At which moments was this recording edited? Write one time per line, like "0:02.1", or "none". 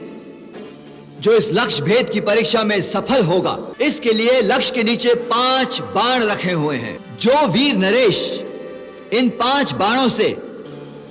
0:03.7
0:07.0